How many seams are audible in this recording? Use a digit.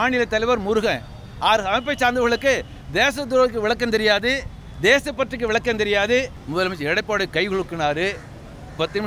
1